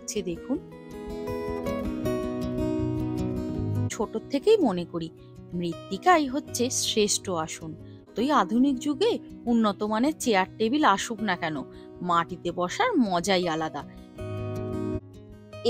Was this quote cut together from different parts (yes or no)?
yes